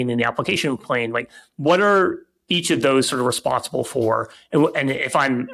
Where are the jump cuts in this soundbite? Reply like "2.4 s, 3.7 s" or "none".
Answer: none